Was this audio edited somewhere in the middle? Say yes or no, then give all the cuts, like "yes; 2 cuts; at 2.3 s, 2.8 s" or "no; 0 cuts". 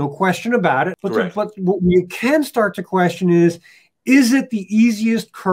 yes; 1 cut; at 0.9 s